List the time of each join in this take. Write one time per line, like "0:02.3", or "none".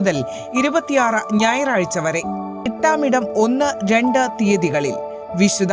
0:02.7